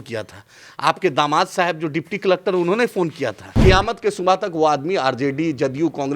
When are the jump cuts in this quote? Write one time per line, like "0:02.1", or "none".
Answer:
0:03.6